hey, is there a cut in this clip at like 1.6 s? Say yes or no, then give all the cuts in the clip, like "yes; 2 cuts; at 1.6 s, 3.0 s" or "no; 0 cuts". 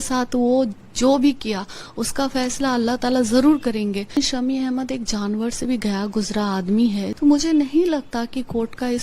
no; 2 cuts; at 4.2 s, 7.1 s